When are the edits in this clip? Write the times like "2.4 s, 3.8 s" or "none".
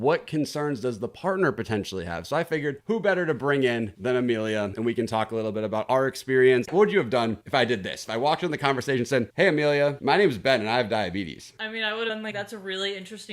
6.7 s